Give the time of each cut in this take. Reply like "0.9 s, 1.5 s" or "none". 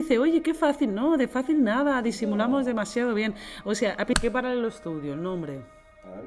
4.1 s